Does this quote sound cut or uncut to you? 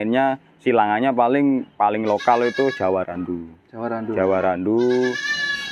uncut